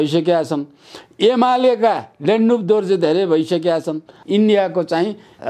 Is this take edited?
yes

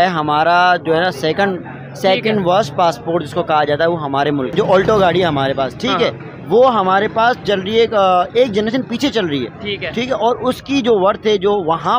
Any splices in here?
yes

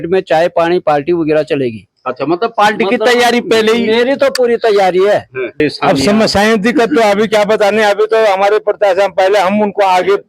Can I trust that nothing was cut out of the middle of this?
no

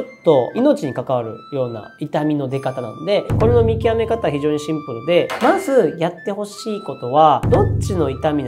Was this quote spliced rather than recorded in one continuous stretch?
yes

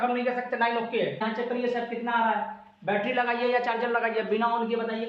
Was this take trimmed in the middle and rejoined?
yes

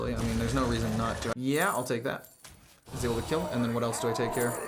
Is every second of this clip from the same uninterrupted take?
no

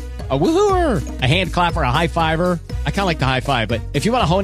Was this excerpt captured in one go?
yes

